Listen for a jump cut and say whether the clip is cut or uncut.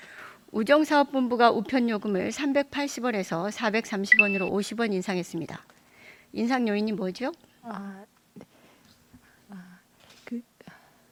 uncut